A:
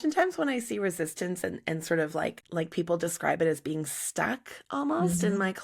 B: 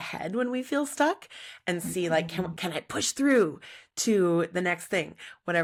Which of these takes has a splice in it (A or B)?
A